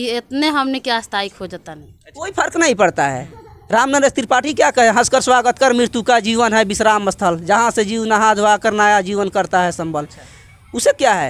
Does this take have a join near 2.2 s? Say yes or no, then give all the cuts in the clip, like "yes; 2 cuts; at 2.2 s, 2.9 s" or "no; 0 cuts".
yes; 1 cut; at 2.2 s